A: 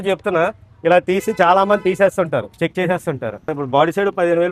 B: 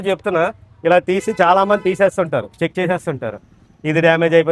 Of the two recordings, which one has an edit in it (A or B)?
A